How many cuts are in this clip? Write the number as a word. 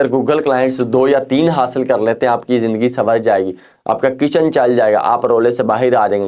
zero